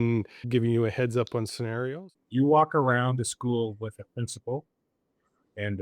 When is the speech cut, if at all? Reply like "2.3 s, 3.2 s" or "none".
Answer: 2.0 s